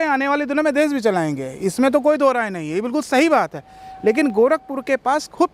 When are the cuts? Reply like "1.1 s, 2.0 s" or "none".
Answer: none